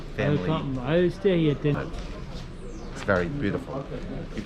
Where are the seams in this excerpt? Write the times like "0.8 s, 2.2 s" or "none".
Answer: 1.7 s